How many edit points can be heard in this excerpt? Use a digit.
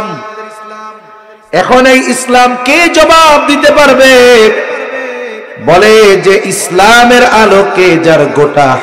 0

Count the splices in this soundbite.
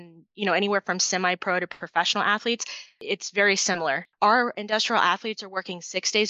2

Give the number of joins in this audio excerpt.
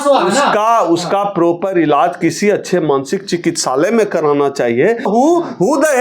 1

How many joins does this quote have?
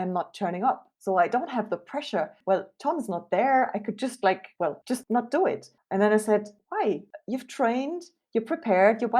3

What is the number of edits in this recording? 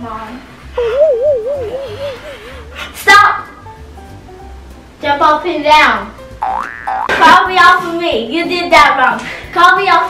1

